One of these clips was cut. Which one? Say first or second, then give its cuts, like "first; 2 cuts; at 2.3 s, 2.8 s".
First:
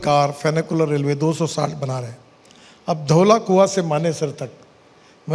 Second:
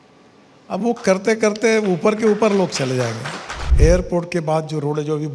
second; 1 cut; at 3.6 s